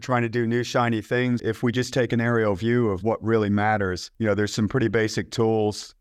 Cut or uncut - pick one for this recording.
cut